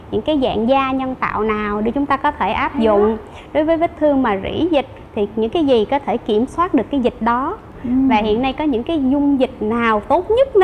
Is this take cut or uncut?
cut